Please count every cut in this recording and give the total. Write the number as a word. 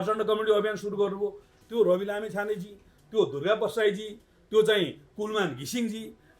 one